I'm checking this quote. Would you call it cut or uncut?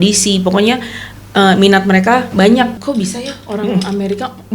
cut